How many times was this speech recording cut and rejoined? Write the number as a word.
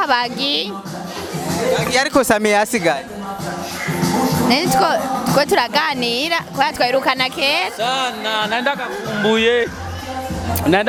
zero